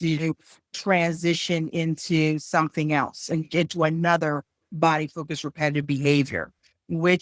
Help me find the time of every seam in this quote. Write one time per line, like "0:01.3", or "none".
none